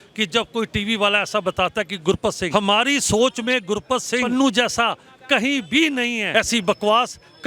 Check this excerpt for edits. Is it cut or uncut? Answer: cut